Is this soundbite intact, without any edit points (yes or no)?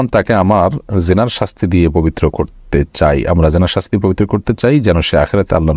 yes